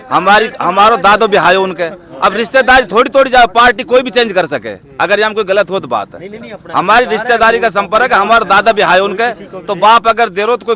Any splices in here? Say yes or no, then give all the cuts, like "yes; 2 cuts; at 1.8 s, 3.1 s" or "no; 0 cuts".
no; 0 cuts